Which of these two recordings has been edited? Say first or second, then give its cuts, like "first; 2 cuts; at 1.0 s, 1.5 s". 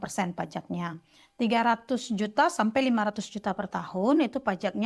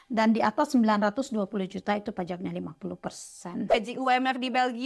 second; 1 cut; at 3.7 s